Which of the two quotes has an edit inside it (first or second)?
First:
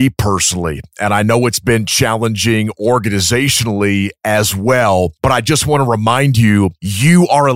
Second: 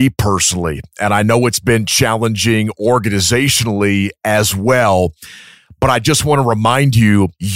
first